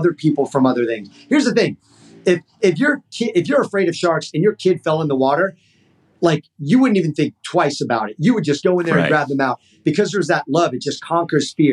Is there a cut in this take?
no; 0 cuts

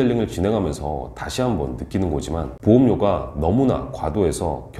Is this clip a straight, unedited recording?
no; 1 cut; at 2.5 s

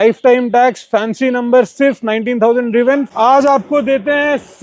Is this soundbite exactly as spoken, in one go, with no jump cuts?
no; 1 cut; at 3.1 s

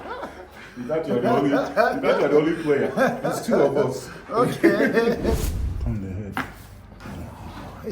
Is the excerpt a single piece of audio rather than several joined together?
no; 1 cut; at 5.3 s

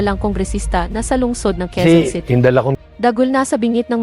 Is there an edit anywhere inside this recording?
yes; 1 cut; at 1.8 s

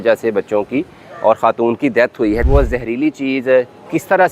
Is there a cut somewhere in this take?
yes; 1 cut; at 2.4 s

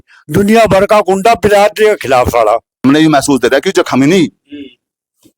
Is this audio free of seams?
no; 1 cut; at 2.8 s

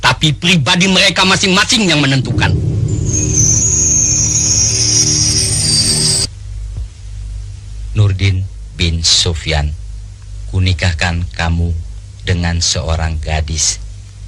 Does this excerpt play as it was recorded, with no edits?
no; 1 cut; at 6.2 s

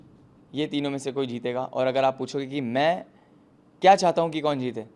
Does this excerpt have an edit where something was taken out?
no; 0 cuts

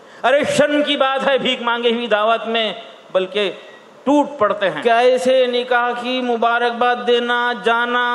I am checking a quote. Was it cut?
yes; 1 cut; at 4.8 s

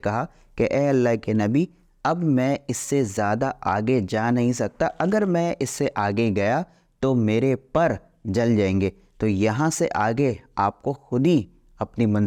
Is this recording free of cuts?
yes; 0 cuts

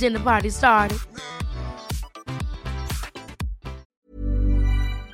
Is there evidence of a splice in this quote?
yes; 1 cut; at 3.9 s

